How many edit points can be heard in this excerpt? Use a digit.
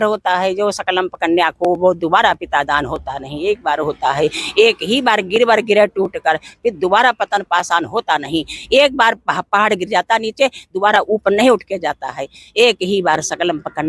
0